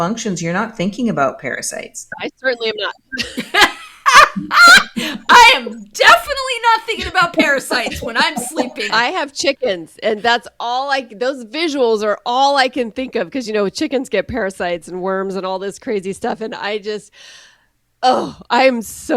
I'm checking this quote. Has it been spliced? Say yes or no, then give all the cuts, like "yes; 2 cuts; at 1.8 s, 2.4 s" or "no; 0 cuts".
yes; 2 cuts; at 2.2 s, 8.9 s